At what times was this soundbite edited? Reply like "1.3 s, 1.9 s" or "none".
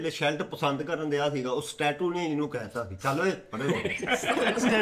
none